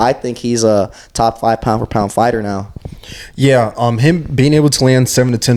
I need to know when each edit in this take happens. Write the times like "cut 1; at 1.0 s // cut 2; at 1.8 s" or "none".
none